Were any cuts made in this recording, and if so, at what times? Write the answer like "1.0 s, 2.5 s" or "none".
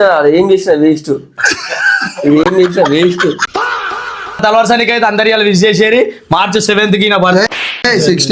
4.4 s

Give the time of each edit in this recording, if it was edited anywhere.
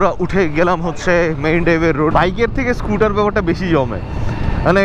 2.1 s

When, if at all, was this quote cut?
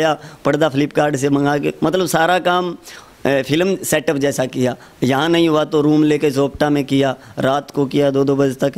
none

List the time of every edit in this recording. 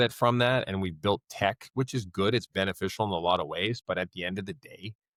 none

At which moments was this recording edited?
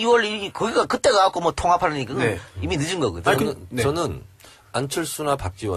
none

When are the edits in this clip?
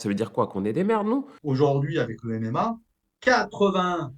1.3 s

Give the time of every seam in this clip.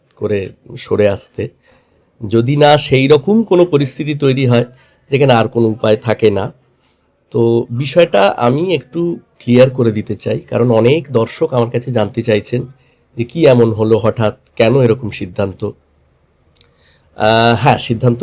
none

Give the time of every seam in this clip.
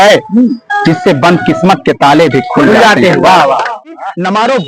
3.7 s

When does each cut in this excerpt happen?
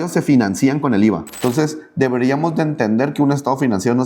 1.3 s

